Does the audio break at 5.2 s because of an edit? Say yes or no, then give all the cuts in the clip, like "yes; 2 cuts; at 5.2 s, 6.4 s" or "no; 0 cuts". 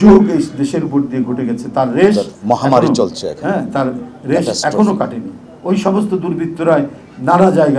no; 0 cuts